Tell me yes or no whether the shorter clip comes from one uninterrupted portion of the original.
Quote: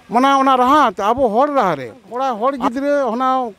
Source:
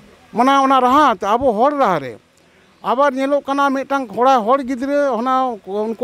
no